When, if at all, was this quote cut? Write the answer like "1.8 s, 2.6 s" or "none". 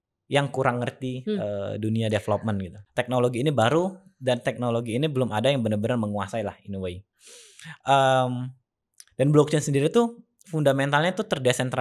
2.8 s